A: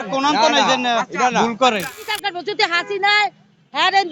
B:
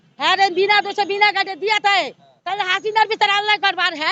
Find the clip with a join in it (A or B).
A